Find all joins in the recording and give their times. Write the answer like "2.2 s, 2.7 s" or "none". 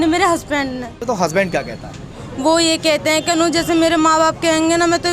1.0 s